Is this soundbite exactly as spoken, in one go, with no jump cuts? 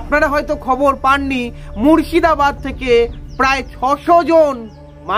yes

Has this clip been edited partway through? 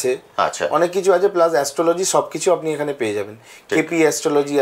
no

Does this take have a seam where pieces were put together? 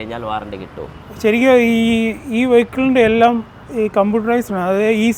no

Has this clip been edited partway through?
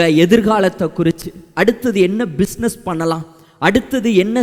no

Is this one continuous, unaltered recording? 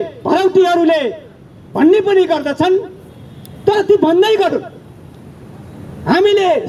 yes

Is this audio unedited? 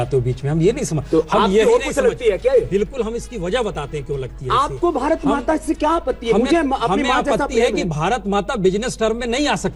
yes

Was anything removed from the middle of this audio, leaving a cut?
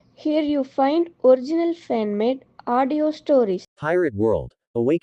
yes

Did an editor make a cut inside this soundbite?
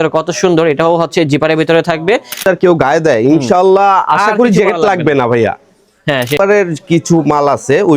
yes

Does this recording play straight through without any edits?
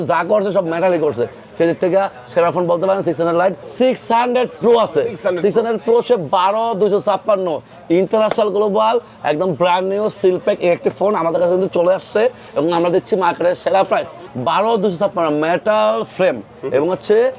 no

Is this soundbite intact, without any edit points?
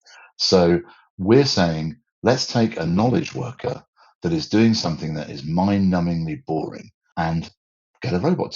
no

